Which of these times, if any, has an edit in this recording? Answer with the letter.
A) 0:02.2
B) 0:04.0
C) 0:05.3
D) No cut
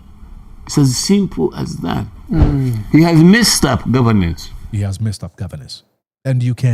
A